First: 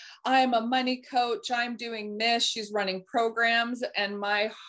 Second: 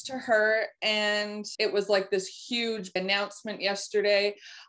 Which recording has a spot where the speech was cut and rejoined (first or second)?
second